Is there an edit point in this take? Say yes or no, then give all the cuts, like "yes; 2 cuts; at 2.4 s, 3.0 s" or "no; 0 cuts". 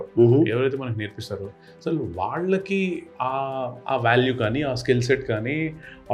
no; 0 cuts